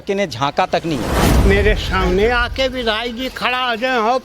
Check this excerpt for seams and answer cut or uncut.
cut